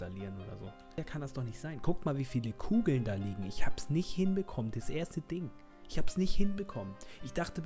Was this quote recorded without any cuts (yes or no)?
no